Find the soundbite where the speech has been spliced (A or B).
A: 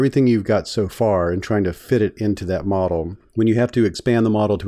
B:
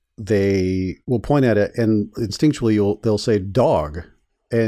B